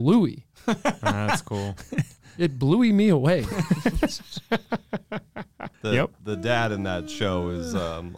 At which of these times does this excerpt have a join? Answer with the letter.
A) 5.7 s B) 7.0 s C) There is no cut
A